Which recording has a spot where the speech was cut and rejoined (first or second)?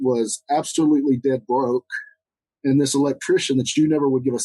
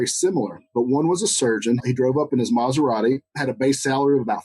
second